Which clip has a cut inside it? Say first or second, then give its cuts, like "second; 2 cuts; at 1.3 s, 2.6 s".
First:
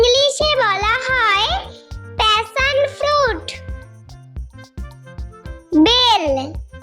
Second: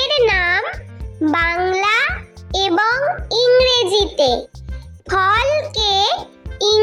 first; 2 cuts; at 4.1 s, 5.7 s